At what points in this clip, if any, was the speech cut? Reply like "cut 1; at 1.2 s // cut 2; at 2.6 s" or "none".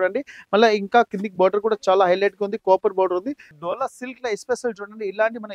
cut 1; at 3.4 s